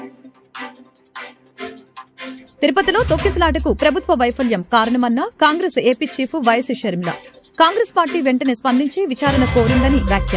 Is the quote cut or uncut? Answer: cut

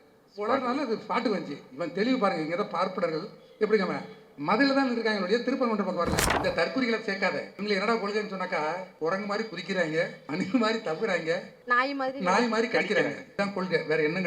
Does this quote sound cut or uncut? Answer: cut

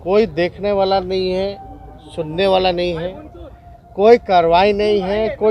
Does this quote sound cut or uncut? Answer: uncut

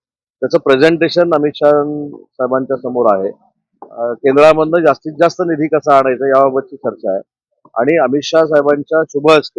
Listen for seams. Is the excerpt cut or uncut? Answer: uncut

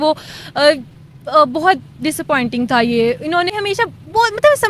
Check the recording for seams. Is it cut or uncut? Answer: cut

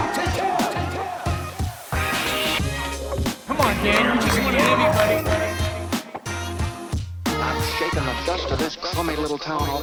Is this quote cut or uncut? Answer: uncut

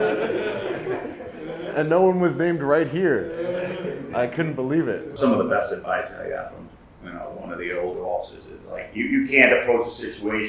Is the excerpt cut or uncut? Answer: cut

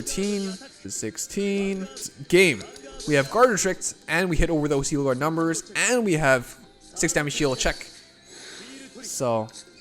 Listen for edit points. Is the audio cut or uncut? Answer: cut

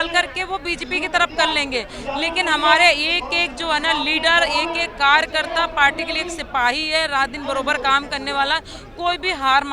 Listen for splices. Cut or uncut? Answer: uncut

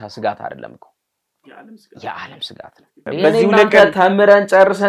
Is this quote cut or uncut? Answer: cut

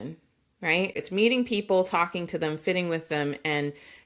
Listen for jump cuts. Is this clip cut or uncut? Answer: cut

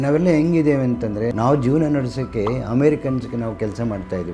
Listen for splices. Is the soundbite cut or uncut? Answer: cut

